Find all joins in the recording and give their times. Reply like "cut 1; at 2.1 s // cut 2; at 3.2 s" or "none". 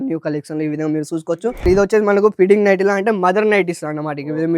cut 1; at 1.6 s